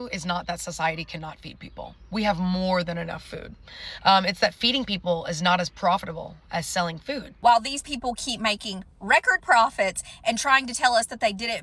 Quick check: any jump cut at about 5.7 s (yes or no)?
no